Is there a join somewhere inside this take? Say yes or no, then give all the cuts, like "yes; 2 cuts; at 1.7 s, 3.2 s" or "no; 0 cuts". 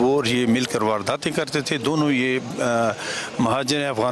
no; 0 cuts